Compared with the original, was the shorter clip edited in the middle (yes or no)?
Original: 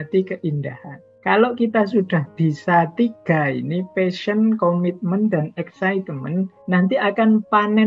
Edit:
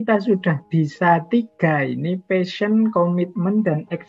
no